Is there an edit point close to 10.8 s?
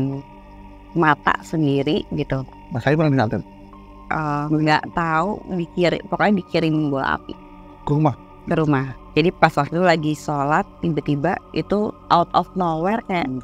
yes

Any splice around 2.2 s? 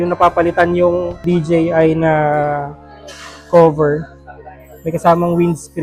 no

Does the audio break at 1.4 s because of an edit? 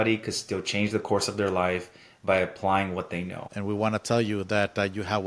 no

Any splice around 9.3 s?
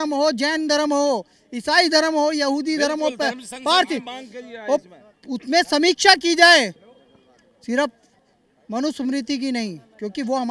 no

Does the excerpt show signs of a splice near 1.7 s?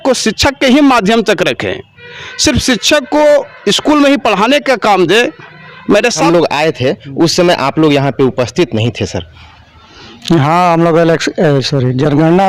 no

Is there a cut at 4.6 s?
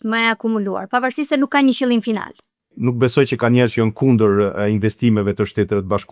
no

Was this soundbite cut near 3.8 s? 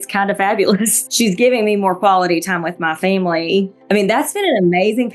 yes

